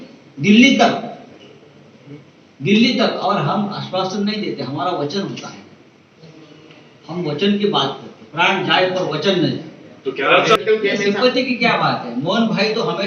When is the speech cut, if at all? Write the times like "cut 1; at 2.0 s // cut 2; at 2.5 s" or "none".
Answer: cut 1; at 10.6 s